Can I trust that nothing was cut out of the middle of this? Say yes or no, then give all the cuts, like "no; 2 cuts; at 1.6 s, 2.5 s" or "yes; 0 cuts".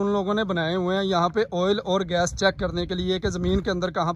yes; 0 cuts